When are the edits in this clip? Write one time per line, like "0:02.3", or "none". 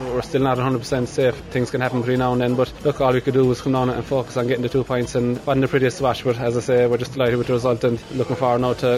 0:01.4
0:02.7
0:05.4
0:08.1

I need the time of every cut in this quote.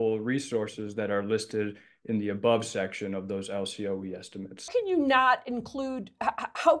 0:04.6

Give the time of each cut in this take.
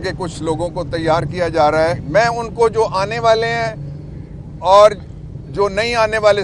0:02.0

